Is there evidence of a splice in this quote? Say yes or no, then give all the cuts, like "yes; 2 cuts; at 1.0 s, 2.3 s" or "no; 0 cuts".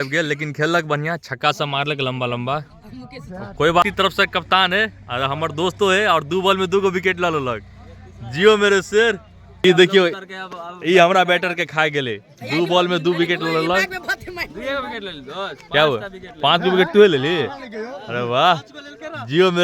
yes; 2 cuts; at 3.8 s, 9.6 s